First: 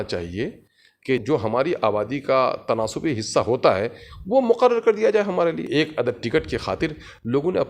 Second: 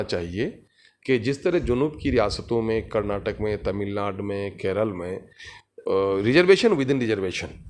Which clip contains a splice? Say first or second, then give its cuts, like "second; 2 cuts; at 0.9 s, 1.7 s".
first; 2 cuts; at 1.2 s, 5.6 s